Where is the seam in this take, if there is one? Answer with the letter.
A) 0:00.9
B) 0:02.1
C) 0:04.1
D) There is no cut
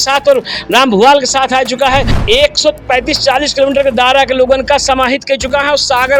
B